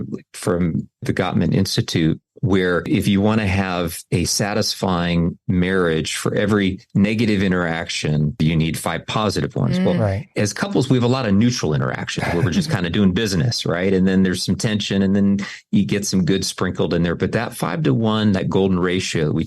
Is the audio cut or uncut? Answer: cut